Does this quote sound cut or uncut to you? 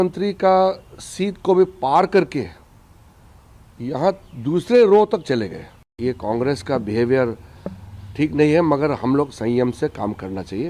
cut